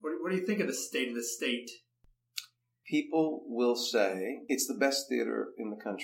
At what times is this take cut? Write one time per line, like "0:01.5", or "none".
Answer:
0:02.1
0:04.4